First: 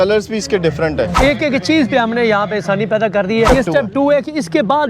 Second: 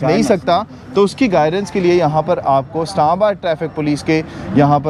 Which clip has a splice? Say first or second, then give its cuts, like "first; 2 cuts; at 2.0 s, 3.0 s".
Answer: first; 2 cuts; at 1.1 s, 3.5 s